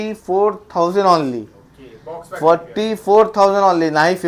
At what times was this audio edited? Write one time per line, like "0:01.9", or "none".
none